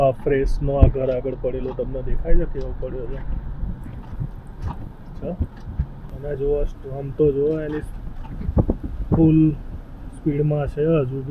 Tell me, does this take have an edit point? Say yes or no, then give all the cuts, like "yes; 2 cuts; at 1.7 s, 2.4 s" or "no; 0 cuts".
no; 0 cuts